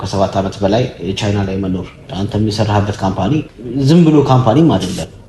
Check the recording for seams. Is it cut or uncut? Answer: cut